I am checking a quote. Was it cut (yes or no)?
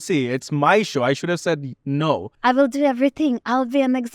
yes